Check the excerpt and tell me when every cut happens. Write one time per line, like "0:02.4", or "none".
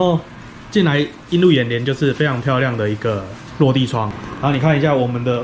0:04.2